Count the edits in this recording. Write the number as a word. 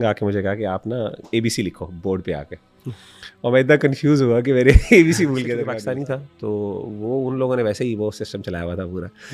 one